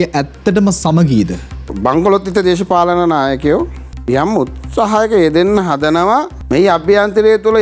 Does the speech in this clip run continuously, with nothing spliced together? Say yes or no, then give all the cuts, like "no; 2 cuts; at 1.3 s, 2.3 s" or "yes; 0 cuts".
no; 3 cuts; at 1.7 s, 3.9 s, 6.4 s